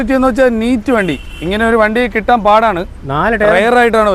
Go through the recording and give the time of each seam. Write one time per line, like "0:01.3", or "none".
none